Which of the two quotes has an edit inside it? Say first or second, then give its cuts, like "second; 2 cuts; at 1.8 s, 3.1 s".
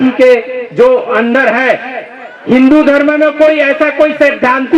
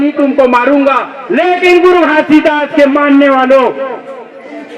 second; 1 cut; at 1.1 s